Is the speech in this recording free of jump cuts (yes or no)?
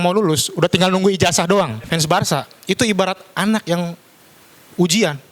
no